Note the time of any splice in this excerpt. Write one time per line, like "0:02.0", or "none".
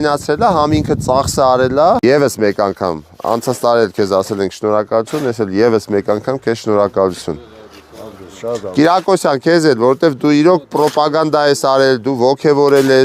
0:02.0